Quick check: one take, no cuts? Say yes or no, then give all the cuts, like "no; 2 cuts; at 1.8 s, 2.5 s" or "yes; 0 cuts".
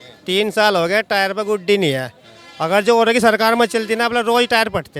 yes; 0 cuts